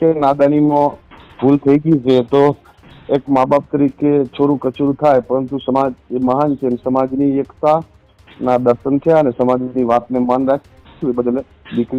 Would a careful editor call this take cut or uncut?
uncut